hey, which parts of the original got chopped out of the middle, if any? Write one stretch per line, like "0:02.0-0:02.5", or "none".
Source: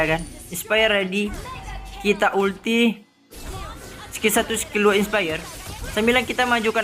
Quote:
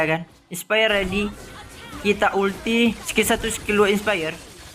0:03.0-0:04.1